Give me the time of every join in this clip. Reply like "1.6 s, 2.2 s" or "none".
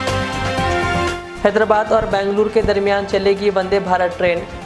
1.1 s